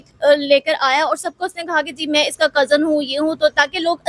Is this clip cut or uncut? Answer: uncut